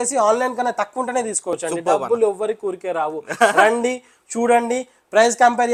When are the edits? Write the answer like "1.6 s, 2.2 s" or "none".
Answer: none